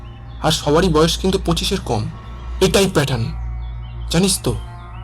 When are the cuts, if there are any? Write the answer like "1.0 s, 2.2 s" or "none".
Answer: 2.2 s